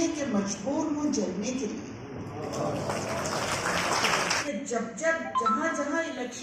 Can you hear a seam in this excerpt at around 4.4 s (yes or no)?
yes